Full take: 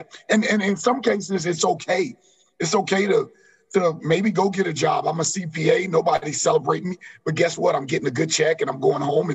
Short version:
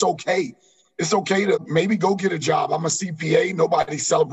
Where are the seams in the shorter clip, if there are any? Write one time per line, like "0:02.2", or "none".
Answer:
0:01.7